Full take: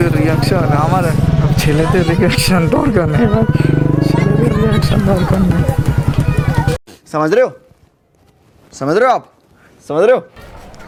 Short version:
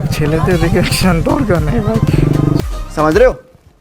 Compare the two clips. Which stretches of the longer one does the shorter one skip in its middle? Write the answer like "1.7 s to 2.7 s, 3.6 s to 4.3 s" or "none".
4.1 s to 6.8 s